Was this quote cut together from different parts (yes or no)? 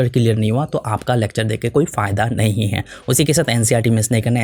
no